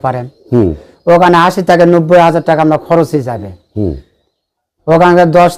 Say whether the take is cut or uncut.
uncut